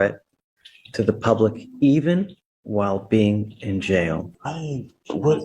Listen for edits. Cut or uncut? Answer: cut